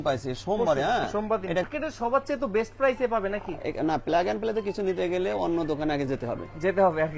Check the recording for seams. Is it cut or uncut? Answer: cut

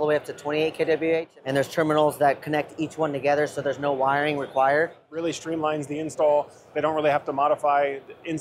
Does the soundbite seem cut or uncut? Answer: cut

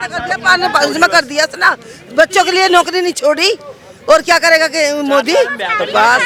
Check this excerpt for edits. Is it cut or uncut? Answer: uncut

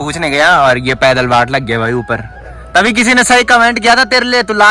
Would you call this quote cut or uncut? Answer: uncut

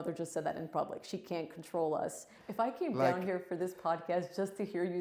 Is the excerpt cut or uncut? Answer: cut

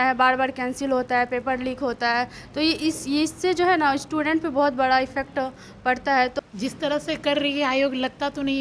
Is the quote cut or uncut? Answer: cut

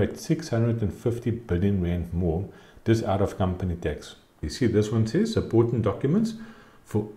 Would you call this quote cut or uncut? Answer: cut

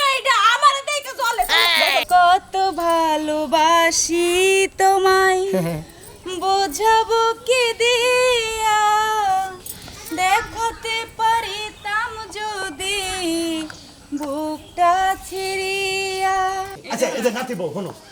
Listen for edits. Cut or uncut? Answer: cut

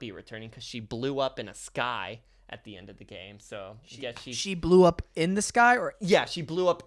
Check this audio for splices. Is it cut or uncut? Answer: uncut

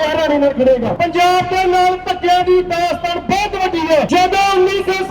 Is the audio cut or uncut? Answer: cut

